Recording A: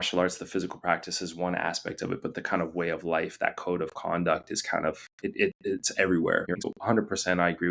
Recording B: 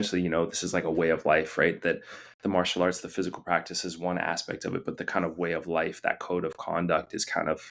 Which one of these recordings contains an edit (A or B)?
A